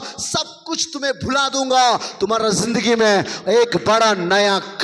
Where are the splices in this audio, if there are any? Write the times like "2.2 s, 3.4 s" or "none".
none